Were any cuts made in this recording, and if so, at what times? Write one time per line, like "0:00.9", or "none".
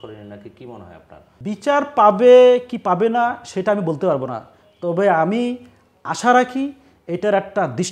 0:01.3

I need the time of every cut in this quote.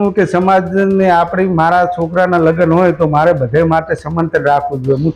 none

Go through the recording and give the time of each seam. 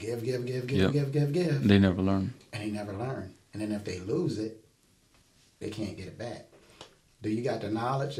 none

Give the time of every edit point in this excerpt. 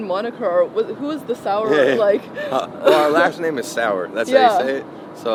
none

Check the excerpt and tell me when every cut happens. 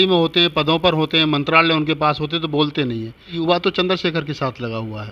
0:03.4

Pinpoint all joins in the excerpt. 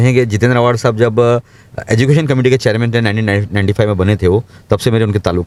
none

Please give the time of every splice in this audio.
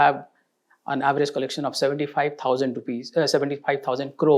none

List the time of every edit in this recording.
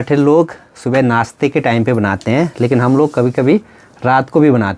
none

